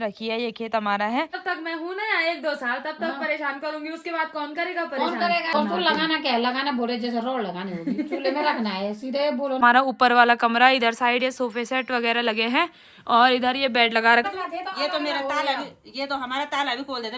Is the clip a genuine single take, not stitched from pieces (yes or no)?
no